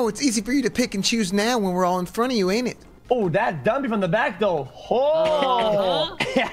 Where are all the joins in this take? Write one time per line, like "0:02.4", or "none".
0:02.9

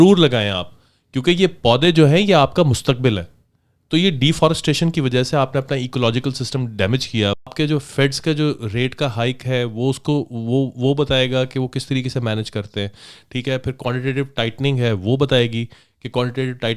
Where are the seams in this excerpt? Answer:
0:07.5

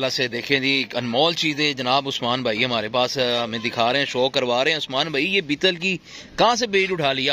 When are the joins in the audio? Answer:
none

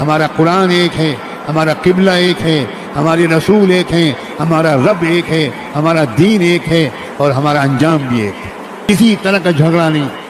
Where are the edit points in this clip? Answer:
0:08.9

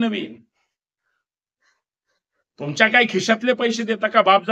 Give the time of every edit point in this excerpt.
none

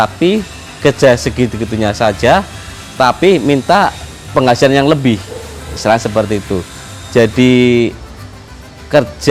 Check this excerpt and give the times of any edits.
none

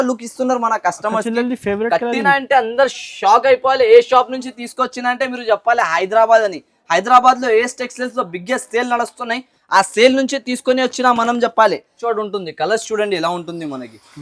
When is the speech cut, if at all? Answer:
0:12.0

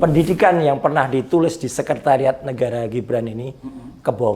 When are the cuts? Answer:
none

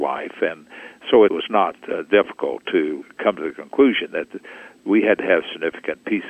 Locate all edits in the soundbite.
0:01.4
0:03.1

